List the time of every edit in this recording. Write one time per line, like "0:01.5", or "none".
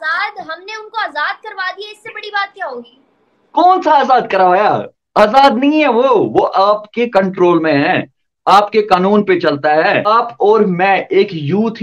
0:10.1